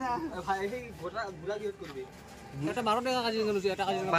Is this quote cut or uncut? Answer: cut